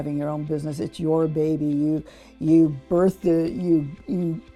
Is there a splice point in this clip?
no; 0 cuts

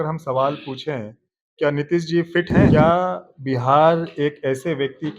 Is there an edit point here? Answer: yes; 1 cut; at 2.7 s

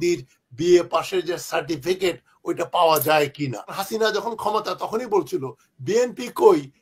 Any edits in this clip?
yes; 1 cut; at 3.8 s

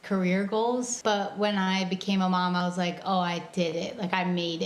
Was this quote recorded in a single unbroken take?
no; 1 cut; at 0.9 s

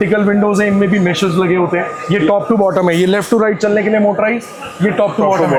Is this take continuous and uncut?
yes; 0 cuts

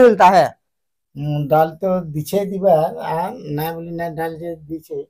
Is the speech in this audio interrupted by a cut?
no; 0 cuts

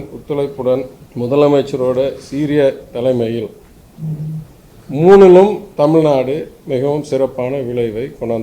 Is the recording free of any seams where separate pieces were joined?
no; 1 cut; at 1.0 s

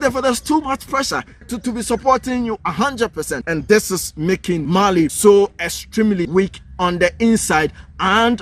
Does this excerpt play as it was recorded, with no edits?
no; 4 cuts; at 1.5 s, 3.4 s, 5.0 s, 6.2 s

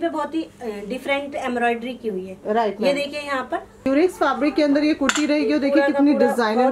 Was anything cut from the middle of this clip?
yes; 1 cut; at 3.9 s

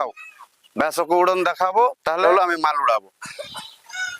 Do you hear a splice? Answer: yes; 1 cut; at 2.2 s

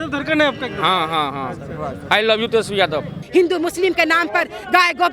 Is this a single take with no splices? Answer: no; 1 cut; at 3.2 s

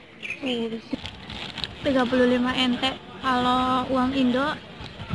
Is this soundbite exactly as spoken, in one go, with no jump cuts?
no; 1 cut; at 0.9 s

